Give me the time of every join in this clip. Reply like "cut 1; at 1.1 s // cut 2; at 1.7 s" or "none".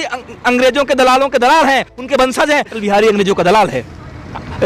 cut 1; at 2.8 s